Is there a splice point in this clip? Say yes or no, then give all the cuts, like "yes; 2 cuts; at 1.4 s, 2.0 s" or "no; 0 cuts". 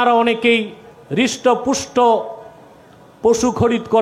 no; 0 cuts